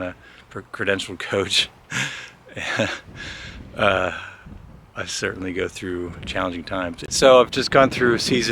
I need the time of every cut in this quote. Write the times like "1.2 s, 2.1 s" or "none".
7.0 s